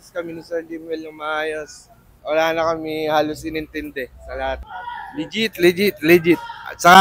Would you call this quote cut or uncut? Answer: cut